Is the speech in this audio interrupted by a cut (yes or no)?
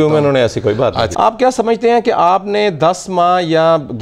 yes